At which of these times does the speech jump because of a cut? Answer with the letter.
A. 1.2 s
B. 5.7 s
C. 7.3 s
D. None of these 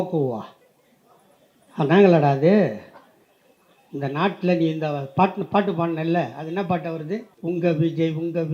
C